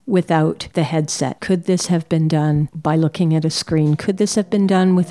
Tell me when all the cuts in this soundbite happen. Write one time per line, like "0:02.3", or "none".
0:01.0